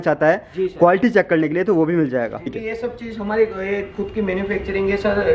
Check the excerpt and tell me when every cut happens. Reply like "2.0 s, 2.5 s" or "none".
2.6 s